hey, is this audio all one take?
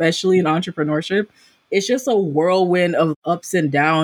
no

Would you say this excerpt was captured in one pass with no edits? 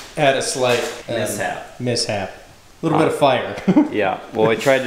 no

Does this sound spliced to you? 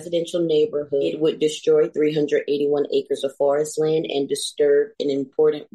yes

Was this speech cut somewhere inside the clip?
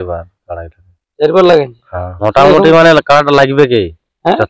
yes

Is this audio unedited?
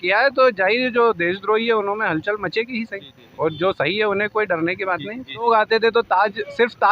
no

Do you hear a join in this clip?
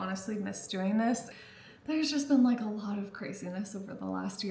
yes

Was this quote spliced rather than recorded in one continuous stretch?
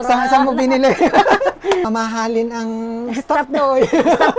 yes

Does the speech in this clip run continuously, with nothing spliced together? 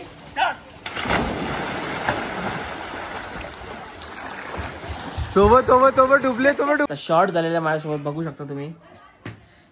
no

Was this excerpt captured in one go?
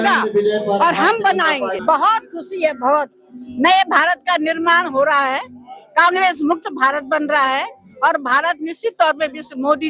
no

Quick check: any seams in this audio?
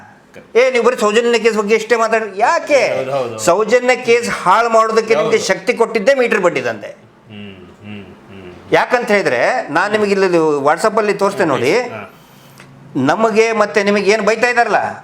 no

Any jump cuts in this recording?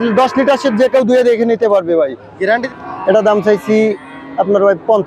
yes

